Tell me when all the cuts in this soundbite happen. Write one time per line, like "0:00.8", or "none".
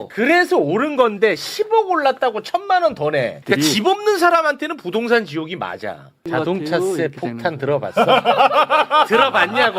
0:03.4
0:06.2